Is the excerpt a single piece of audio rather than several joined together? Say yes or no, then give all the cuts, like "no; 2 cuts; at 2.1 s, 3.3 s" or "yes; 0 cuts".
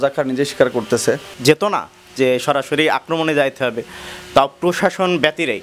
no; 1 cut; at 1.4 s